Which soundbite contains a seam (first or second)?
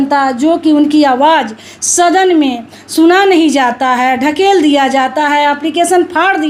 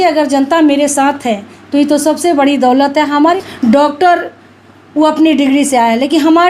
second